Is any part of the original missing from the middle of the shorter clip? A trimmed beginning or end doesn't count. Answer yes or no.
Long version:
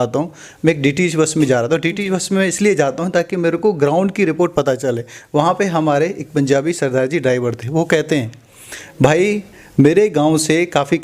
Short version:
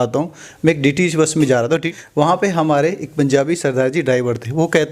yes